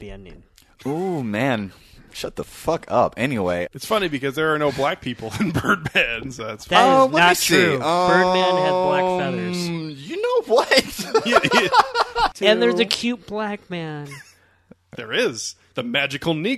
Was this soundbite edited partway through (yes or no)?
yes